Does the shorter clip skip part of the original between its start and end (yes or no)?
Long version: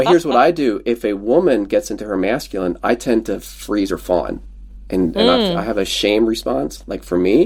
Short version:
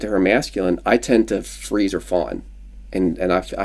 no